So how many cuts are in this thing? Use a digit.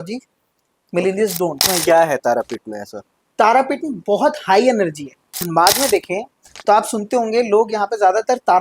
2